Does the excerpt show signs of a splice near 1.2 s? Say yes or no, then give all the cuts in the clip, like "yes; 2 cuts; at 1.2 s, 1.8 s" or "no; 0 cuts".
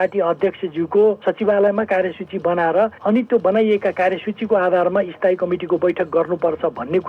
yes; 2 cuts; at 1.2 s, 3.0 s